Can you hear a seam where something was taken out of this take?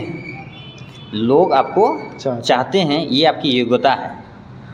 no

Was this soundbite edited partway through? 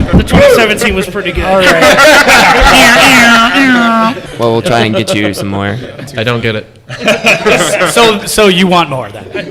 yes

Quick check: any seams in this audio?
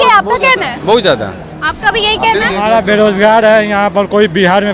no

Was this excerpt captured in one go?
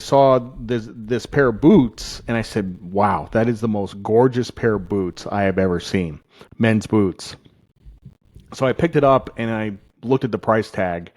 yes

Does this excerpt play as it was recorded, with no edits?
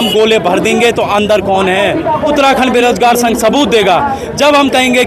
no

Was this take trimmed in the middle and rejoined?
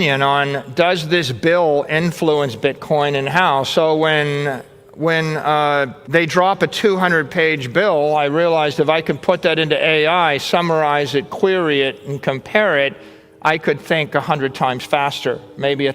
yes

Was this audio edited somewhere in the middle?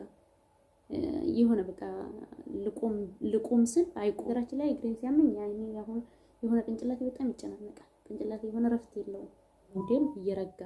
yes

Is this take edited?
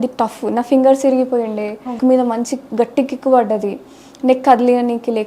yes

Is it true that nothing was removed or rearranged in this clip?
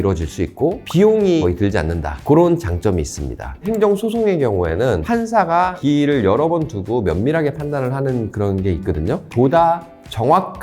no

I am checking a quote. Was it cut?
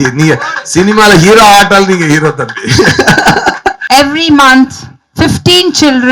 yes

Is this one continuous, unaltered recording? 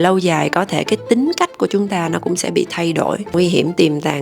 no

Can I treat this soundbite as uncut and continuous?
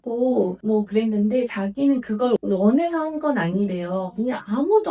no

